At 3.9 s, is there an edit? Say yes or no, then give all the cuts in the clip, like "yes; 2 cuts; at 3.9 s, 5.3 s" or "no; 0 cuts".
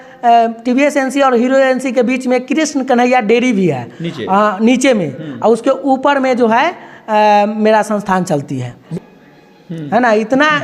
no; 1 cut; at 8.8 s